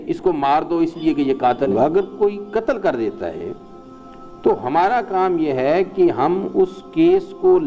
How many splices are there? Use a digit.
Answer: 1